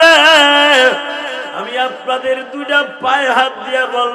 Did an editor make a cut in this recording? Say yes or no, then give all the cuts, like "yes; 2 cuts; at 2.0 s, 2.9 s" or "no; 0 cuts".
yes; 1 cut; at 1.5 s